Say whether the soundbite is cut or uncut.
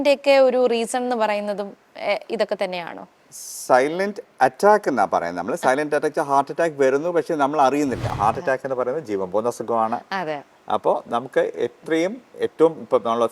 cut